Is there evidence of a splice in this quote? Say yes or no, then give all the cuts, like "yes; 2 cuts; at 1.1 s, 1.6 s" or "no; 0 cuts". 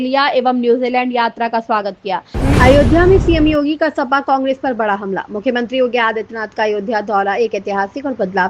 yes; 1 cut; at 2.4 s